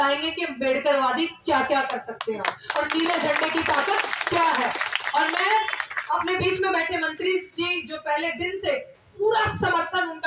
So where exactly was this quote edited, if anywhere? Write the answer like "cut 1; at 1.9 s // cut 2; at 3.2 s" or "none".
none

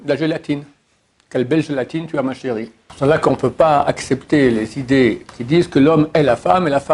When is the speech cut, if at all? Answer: cut 1; at 2.8 s // cut 2; at 5.2 s

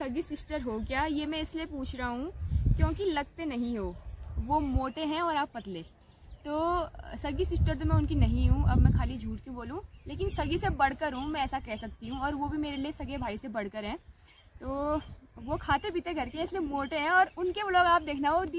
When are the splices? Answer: none

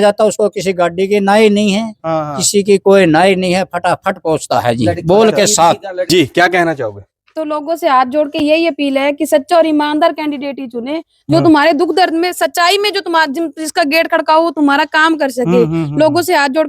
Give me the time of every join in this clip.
cut 1; at 6.1 s

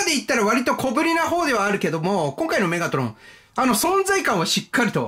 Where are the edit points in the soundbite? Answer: none

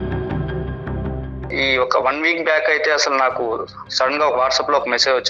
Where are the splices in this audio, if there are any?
cut 1; at 1.5 s

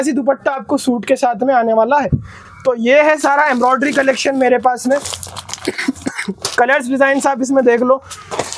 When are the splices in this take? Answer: none

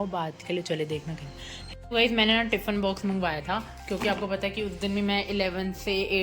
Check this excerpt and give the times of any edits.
cut 1; at 1.6 s

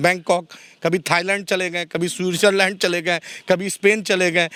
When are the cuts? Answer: none

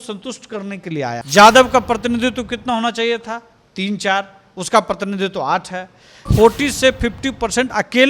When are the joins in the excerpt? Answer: cut 1; at 1.2 s // cut 2; at 6.3 s

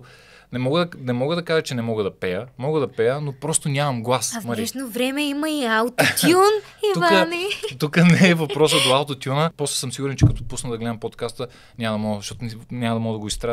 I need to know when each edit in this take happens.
cut 1; at 9.5 s

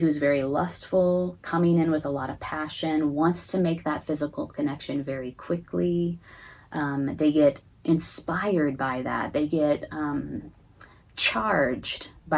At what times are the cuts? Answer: none

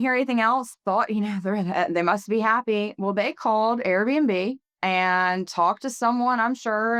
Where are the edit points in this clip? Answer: none

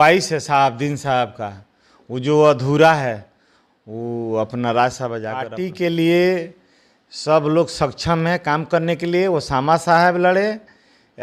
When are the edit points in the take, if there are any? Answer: cut 1; at 5.5 s

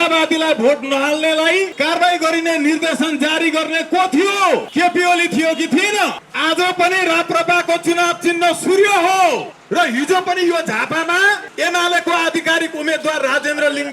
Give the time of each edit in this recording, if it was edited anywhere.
cut 1; at 1.7 s // cut 2; at 4.7 s // cut 3; at 6.3 s // cut 4; at 9.6 s // cut 5; at 11.5 s

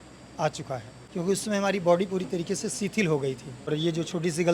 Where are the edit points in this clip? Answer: cut 1; at 1.0 s // cut 2; at 3.7 s

